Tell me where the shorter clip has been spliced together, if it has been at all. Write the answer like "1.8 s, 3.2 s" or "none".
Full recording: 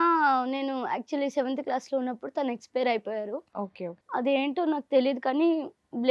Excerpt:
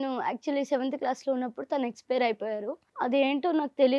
2.8 s